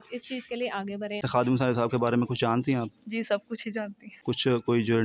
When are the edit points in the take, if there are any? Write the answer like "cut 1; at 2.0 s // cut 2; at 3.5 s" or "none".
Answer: cut 1; at 1.2 s // cut 2; at 4.1 s